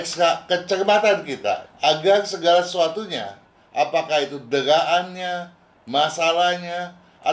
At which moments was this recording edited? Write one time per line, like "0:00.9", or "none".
0:01.7